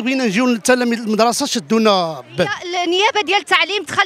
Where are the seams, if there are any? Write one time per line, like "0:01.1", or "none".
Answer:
0:02.7